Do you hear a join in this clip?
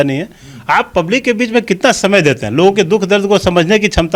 no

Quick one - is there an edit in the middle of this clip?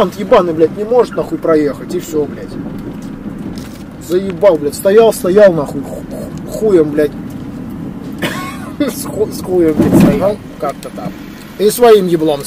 yes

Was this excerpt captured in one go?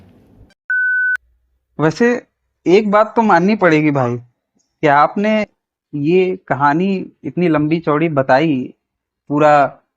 no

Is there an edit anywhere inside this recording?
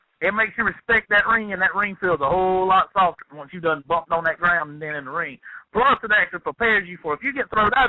yes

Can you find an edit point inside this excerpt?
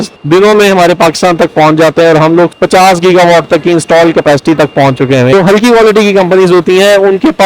yes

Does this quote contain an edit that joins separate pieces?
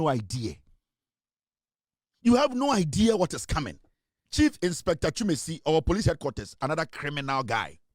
yes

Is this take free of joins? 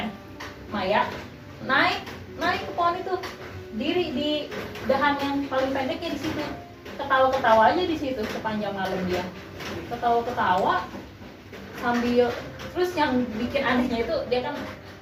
yes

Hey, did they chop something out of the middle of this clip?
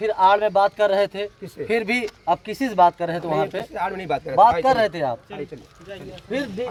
no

